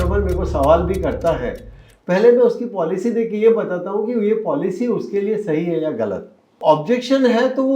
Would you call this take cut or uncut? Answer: cut